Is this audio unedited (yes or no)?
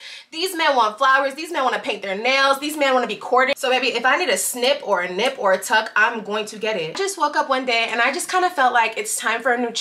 no